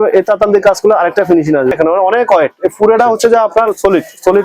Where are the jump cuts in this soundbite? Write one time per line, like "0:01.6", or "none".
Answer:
0:01.8

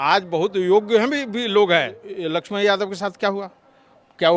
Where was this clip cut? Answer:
0:02.1

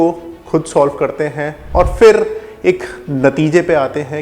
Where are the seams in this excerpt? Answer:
0:01.5

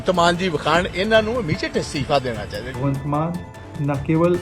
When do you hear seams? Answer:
0:02.7

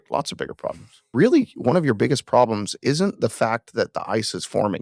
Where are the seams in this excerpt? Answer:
0:01.0

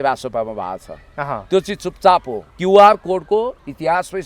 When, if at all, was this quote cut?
0:02.5

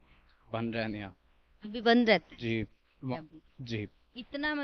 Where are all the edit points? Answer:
0:03.1

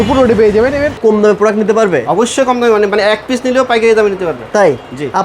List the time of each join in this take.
0:01.0

